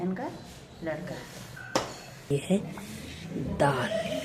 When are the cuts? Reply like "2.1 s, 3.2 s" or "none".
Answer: 2.3 s